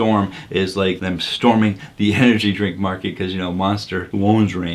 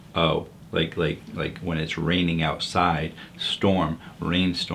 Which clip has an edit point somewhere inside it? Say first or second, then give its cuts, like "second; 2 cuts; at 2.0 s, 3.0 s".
first; 1 cut; at 1.0 s